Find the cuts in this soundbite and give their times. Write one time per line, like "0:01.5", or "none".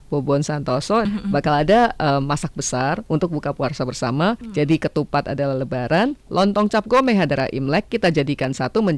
0:01.0
0:04.4